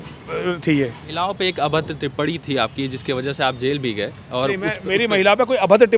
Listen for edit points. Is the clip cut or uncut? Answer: cut